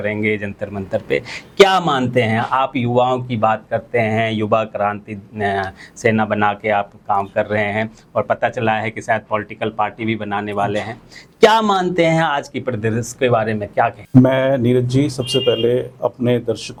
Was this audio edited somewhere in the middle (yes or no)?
no